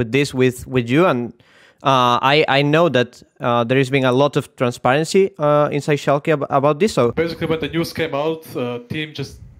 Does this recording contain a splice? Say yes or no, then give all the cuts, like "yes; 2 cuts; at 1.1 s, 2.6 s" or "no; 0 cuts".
yes; 1 cut; at 7.1 s